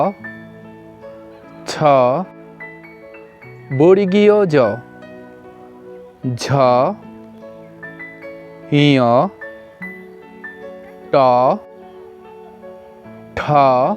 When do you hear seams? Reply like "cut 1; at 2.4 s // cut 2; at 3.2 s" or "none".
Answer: cut 1; at 2.3 s // cut 2; at 3.7 s // cut 3; at 4.8 s // cut 4; at 6.2 s // cut 5; at 7.0 s // cut 6; at 8.4 s